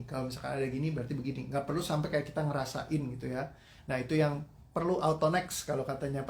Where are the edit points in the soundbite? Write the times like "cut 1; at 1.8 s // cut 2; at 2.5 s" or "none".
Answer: none